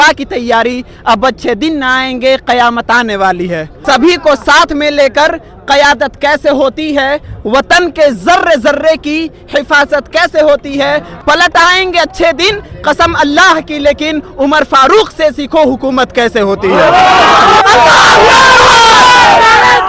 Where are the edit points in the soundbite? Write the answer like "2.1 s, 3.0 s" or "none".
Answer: 3.7 s, 11.1 s, 17.6 s